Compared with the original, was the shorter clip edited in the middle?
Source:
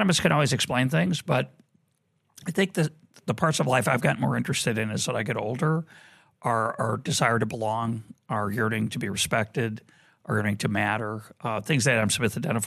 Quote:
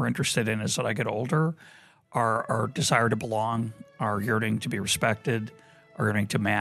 no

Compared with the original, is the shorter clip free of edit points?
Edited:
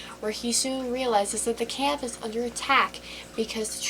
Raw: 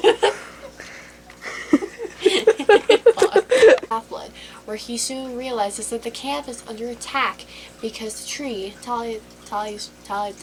yes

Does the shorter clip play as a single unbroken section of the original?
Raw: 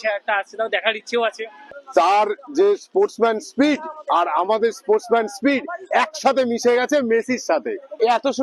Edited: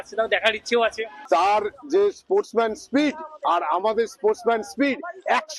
no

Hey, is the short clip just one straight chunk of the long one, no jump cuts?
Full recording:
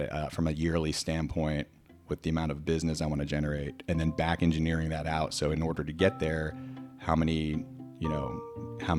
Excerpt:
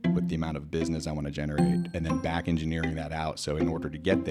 yes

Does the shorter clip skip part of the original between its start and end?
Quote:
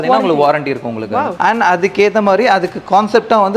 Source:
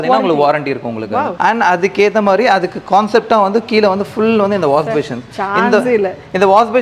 no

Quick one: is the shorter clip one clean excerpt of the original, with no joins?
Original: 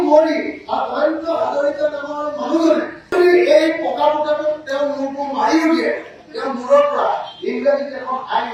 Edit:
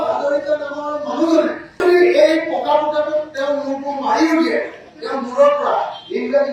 yes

